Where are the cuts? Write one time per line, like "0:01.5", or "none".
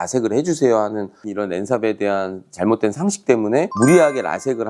0:01.2